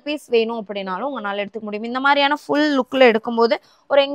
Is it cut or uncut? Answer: uncut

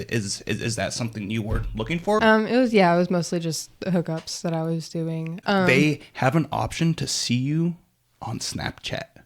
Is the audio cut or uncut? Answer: cut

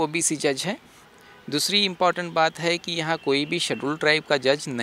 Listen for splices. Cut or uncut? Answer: uncut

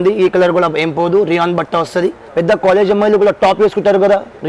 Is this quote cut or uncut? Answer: cut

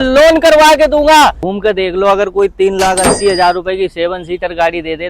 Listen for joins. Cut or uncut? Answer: cut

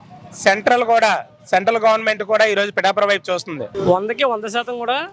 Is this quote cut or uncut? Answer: cut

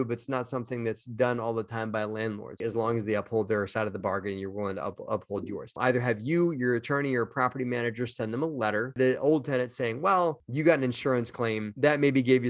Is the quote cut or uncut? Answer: cut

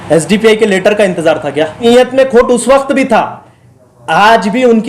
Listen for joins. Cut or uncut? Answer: cut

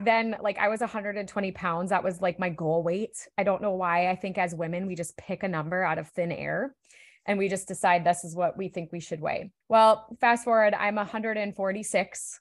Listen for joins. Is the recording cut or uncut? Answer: cut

